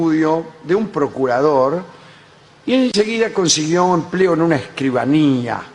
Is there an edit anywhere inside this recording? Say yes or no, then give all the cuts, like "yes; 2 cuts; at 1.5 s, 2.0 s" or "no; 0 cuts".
yes; 1 cut; at 1.9 s